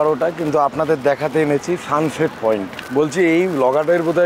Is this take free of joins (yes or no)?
no